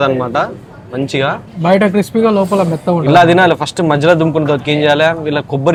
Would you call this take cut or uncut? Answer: uncut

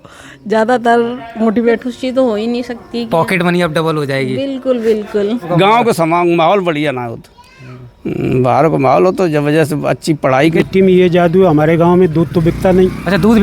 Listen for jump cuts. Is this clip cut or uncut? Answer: cut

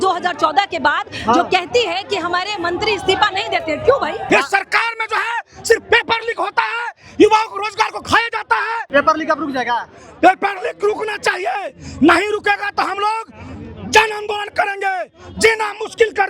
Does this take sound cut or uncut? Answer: cut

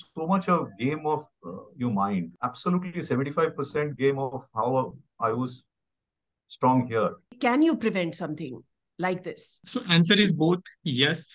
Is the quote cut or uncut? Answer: cut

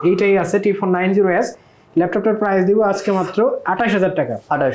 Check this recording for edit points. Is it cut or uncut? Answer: uncut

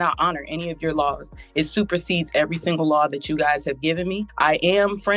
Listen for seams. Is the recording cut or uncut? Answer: cut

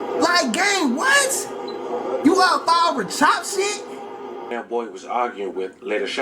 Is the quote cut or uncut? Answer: cut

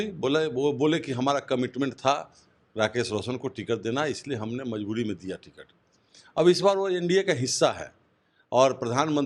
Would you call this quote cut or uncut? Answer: uncut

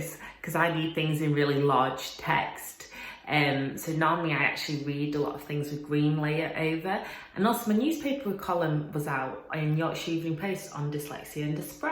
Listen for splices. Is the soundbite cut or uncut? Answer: uncut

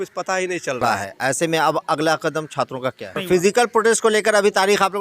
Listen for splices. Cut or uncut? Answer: cut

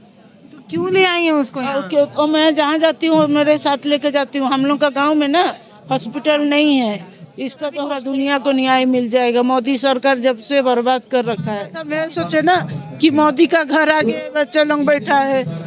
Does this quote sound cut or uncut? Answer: cut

